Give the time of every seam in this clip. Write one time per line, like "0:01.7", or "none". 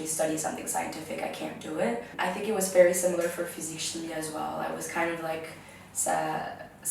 0:02.1

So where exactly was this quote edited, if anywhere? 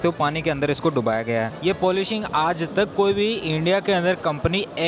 0:01.5

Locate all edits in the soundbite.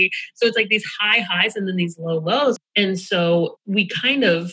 0:02.6
0:03.6

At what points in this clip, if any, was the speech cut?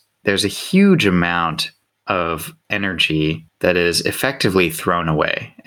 0:02.5
0:03.5

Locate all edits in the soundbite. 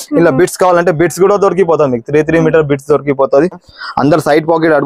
0:03.6

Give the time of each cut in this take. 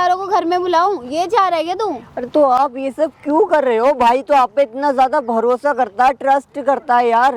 none

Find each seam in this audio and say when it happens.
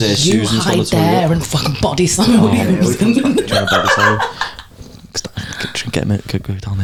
none

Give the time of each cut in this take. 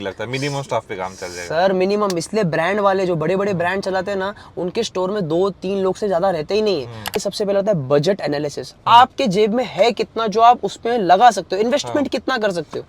0:07.2

